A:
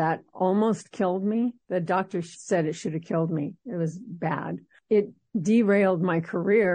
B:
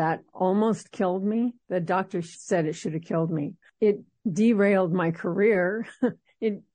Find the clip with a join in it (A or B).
B